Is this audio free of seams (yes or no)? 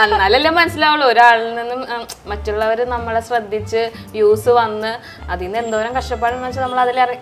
yes